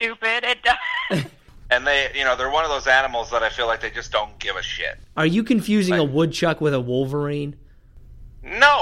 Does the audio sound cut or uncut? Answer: cut